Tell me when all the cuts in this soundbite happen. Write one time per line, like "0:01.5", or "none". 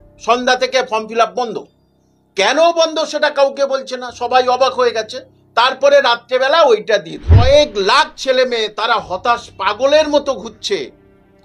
0:07.3